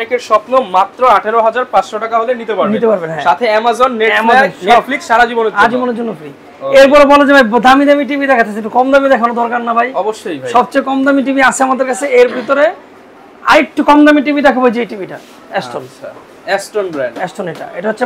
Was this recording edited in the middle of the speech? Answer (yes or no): no